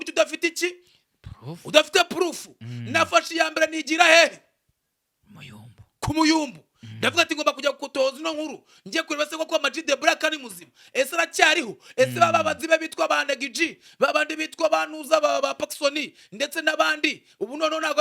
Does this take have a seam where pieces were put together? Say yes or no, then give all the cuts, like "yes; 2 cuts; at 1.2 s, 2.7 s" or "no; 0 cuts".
no; 0 cuts